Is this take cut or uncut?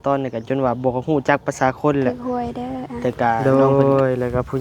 cut